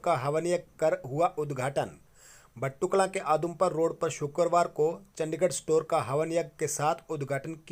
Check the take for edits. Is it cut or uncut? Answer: uncut